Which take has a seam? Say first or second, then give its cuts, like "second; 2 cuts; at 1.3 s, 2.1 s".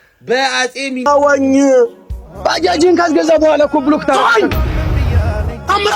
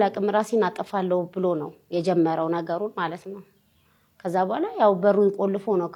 first; 1 cut; at 1.1 s